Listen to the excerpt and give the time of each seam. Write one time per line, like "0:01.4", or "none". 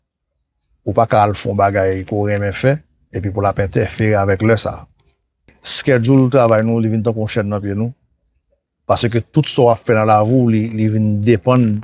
0:05.6